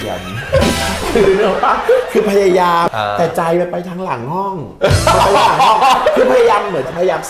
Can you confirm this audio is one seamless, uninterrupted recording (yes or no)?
no